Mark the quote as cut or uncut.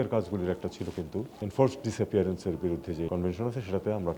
cut